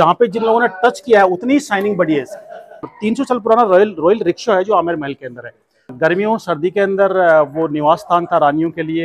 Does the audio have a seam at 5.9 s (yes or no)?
yes